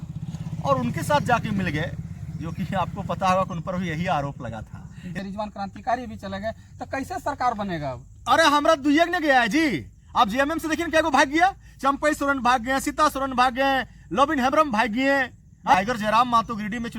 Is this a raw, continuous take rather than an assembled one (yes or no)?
no